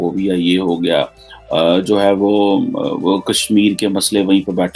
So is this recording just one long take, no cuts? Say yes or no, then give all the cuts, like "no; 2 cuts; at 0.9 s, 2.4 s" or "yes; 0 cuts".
yes; 0 cuts